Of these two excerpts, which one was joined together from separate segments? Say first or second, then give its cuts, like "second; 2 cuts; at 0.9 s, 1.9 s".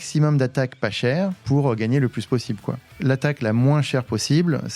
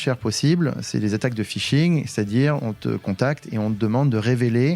first; 2 cuts; at 1.4 s, 2.9 s